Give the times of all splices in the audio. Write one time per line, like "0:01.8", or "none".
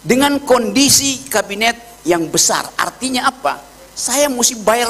none